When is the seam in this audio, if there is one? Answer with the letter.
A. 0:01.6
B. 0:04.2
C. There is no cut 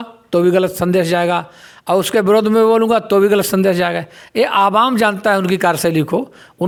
C